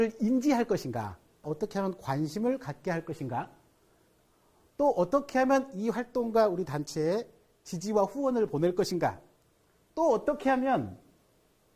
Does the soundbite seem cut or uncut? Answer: cut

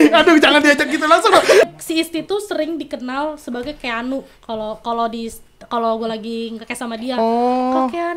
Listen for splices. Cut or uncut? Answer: cut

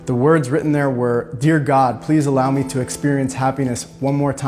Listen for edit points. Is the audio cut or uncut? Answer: uncut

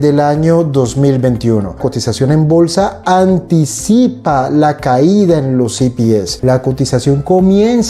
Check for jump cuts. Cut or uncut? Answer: cut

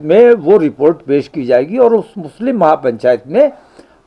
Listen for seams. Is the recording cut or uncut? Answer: uncut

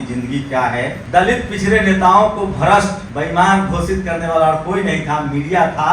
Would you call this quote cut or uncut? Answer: cut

